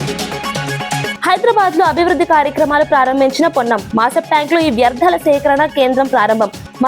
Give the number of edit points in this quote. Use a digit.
1